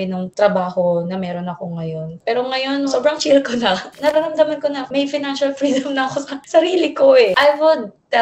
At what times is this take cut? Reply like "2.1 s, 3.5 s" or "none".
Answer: 2.9 s, 3.9 s, 7.3 s